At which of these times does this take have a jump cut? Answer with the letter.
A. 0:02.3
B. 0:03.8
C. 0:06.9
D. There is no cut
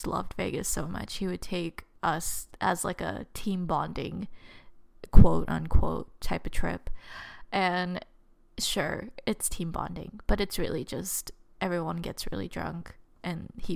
A